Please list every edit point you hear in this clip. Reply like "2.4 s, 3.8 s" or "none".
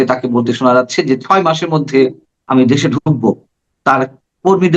2.4 s